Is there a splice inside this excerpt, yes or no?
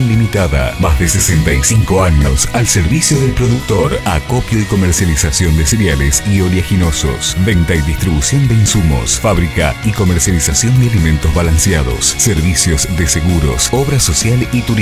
no